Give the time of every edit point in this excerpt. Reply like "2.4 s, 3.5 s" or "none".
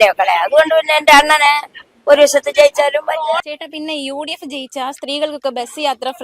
3.5 s